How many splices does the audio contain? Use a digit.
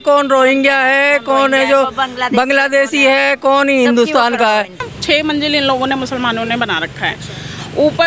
1